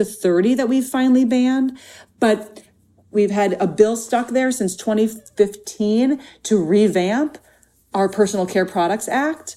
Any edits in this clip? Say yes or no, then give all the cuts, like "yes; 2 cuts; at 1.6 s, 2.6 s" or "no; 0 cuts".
yes; 1 cut; at 3.1 s